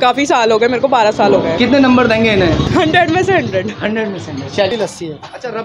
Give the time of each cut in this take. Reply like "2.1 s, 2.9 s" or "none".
2.6 s, 4.7 s

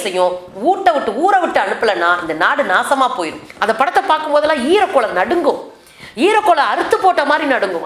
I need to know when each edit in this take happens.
3.4 s

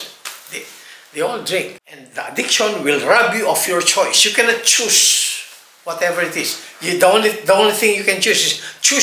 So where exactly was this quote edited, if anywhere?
1.8 s

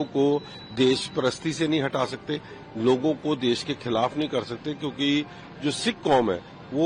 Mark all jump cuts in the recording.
none

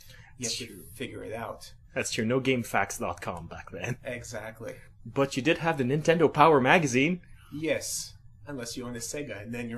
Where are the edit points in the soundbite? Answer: 5.8 s

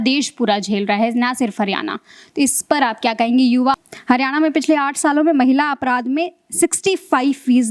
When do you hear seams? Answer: 3.7 s

